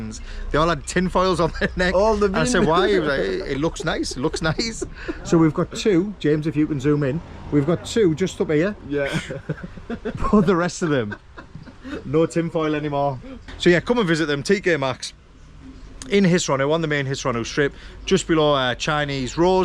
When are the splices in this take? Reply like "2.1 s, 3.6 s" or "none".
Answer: none